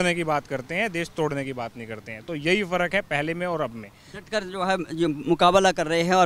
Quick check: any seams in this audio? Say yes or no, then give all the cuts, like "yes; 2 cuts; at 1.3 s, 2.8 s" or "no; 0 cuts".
no; 0 cuts